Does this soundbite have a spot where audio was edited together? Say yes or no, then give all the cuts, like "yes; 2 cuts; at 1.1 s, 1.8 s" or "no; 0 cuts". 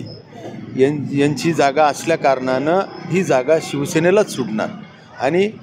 no; 0 cuts